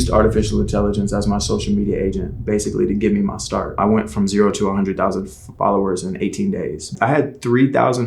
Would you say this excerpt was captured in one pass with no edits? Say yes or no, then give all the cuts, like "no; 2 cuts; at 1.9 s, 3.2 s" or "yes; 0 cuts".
no; 2 cuts; at 3.7 s, 6.9 s